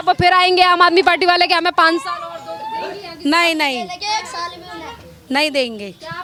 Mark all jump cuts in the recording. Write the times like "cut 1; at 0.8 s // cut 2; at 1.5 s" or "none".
none